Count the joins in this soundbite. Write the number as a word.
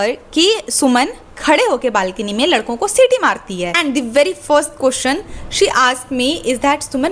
one